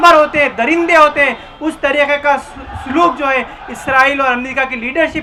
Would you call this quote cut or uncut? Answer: uncut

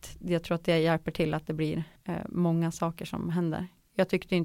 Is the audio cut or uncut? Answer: cut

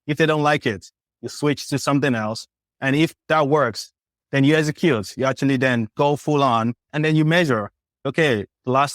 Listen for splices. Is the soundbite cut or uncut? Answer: cut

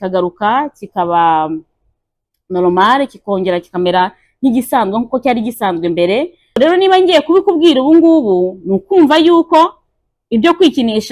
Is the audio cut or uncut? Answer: cut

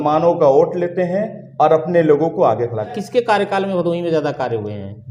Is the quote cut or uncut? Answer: cut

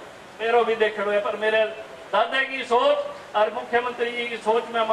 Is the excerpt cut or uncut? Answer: uncut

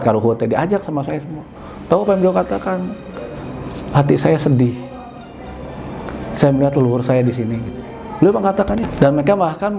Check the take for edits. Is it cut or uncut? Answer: cut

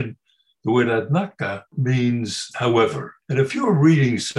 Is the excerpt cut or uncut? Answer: cut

